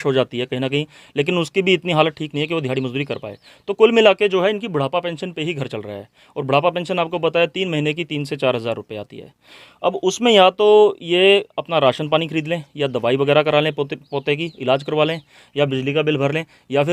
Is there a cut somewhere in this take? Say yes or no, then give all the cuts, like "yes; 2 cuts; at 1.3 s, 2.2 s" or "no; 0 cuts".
no; 0 cuts